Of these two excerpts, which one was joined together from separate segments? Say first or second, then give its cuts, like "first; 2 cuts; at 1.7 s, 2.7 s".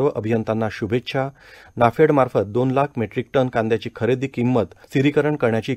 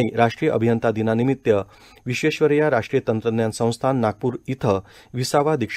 first; 1 cut; at 4.8 s